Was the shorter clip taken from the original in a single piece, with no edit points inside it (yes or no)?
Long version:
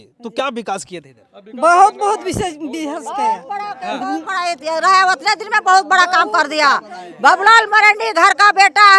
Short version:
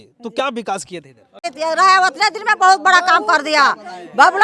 no